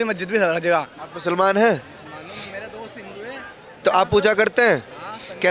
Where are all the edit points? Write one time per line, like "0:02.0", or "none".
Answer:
0:01.0